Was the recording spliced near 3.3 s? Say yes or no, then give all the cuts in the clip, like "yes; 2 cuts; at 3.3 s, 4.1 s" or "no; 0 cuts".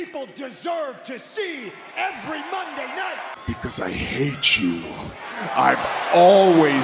yes; 1 cut; at 3.3 s